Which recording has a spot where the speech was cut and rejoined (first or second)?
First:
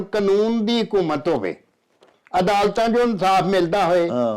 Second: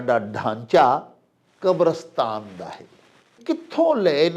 second